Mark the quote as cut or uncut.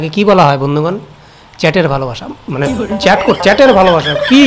uncut